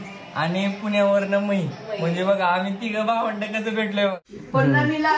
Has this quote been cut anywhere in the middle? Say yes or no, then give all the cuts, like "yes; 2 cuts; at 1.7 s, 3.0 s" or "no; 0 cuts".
yes; 1 cut; at 4.1 s